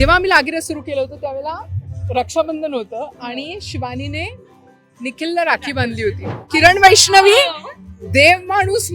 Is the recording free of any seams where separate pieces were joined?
no; 1 cut; at 6.3 s

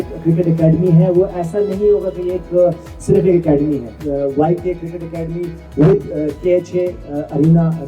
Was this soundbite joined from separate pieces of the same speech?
yes; 1 cut; at 4.0 s

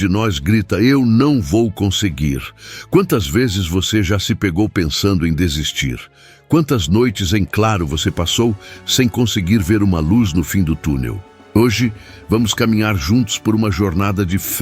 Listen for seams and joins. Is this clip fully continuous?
yes; 0 cuts

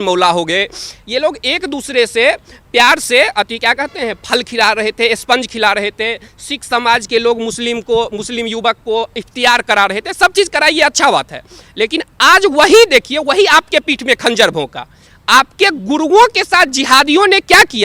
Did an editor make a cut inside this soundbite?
no; 0 cuts

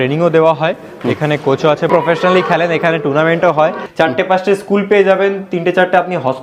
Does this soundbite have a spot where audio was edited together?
yes; 2 cuts; at 1.9 s, 3.8 s

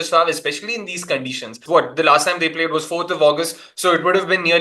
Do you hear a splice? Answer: yes; 1 cut; at 1.6 s

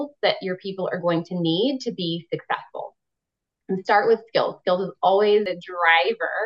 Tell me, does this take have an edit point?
yes; 1 cut; at 5.5 s

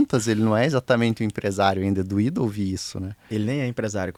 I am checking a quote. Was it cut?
no; 0 cuts

